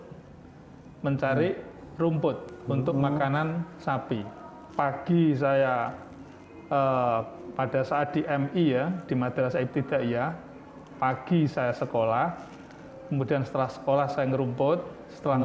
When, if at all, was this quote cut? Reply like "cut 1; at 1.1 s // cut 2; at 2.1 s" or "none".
cut 1; at 4.6 s

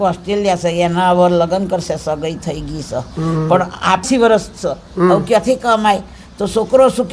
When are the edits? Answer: cut 1; at 4.0 s

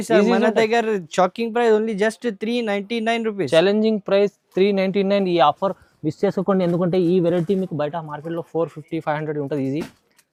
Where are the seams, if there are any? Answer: none

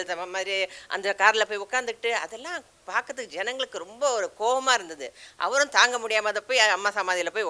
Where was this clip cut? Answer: none

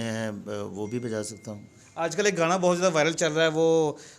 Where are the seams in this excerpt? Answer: none

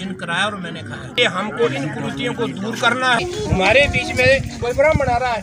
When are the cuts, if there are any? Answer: cut 1; at 1.2 s // cut 2; at 3.2 s

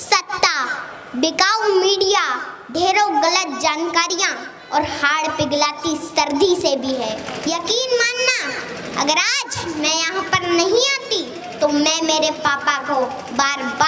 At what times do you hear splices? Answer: cut 1; at 7.3 s

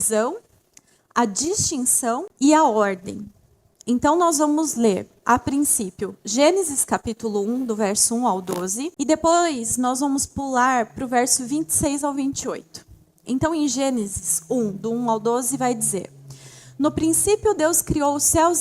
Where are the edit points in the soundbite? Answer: cut 1; at 2.3 s // cut 2; at 8.9 s

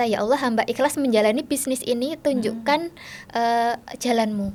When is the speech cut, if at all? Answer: none

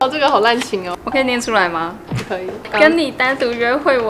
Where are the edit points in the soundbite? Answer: cut 1; at 0.9 s

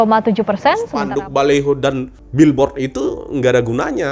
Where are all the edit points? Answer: cut 1; at 0.9 s // cut 2; at 2.2 s

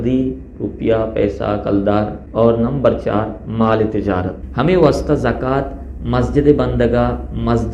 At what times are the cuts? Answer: cut 1; at 2.2 s // cut 2; at 4.4 s

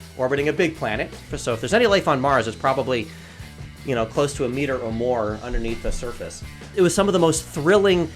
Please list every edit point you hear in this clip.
cut 1; at 1.3 s // cut 2; at 6.7 s

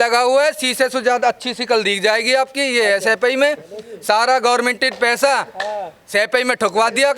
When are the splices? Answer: none

